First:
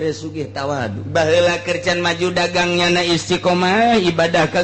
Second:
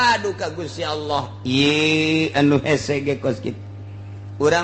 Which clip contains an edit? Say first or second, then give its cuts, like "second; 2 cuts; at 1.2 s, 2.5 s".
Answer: first; 1 cut; at 1.0 s